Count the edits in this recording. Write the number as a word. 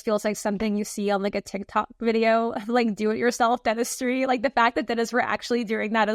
zero